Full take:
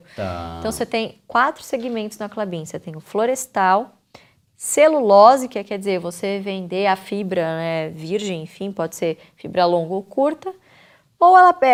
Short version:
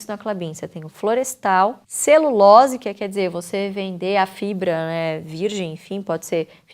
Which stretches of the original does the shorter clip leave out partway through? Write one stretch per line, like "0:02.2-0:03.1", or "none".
0:04.0-0:04.6